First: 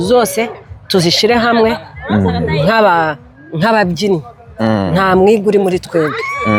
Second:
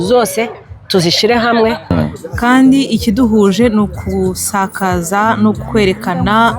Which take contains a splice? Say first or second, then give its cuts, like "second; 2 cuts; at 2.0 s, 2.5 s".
second; 1 cut; at 1.9 s